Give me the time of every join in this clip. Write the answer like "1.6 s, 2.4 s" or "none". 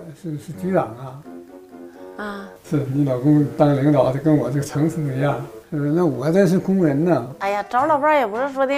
7.3 s